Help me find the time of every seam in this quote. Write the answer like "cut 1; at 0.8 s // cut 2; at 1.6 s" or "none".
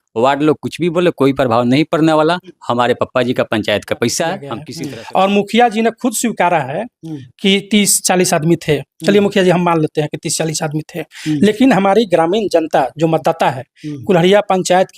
cut 1; at 4.6 s